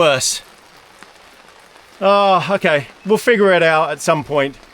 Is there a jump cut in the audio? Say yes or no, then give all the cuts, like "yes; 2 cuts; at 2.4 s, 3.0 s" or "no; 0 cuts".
no; 0 cuts